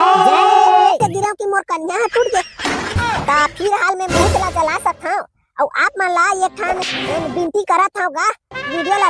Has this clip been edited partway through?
yes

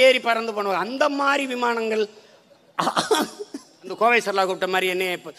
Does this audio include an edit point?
yes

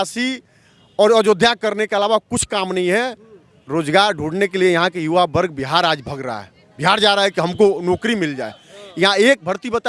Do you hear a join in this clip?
no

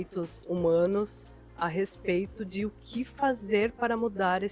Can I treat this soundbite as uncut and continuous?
yes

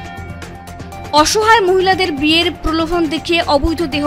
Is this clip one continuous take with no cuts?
no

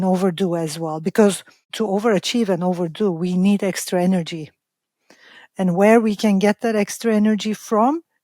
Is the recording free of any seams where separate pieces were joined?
no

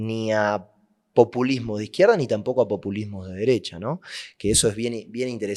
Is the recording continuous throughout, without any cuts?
yes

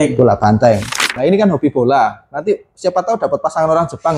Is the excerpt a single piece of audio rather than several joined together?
no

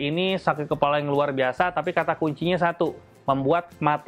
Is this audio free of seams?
yes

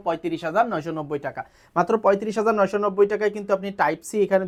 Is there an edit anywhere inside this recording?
no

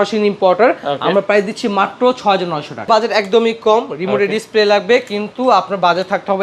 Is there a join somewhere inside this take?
yes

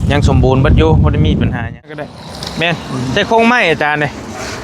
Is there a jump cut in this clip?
yes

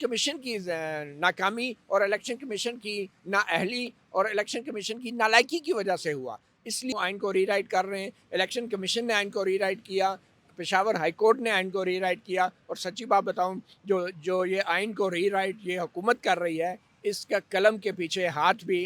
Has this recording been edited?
yes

